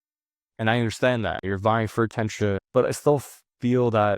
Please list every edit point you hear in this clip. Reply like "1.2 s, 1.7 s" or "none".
1.4 s, 2.6 s